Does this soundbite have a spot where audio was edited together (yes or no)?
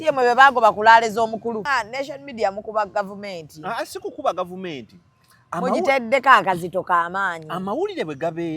yes